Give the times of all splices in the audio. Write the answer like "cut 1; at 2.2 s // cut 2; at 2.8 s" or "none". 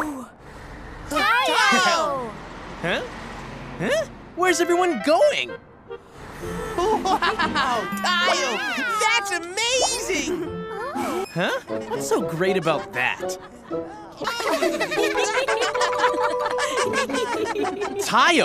cut 1; at 11.2 s // cut 2; at 14.1 s